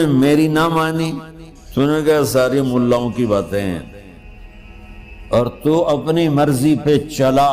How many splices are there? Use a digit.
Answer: 1